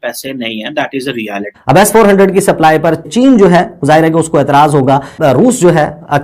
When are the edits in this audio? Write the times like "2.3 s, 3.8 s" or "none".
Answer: 1.5 s, 3.0 s, 5.2 s